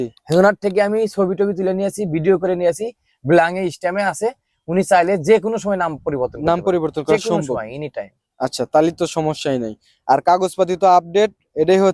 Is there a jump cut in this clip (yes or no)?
no